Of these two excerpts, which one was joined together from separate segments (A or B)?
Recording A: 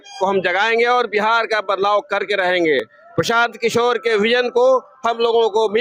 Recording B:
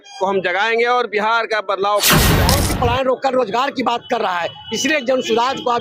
B